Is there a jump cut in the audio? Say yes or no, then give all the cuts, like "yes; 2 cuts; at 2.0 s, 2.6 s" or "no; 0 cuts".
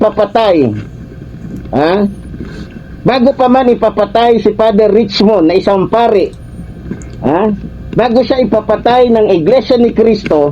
no; 0 cuts